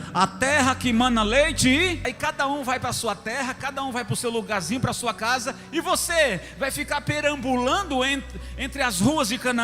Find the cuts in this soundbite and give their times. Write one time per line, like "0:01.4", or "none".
0:02.0